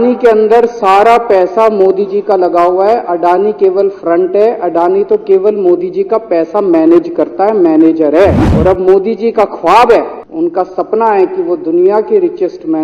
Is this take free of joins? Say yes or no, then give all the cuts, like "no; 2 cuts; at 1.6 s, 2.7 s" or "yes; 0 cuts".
no; 2 cuts; at 8.5 s, 10.2 s